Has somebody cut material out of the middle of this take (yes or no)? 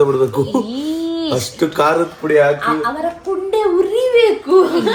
no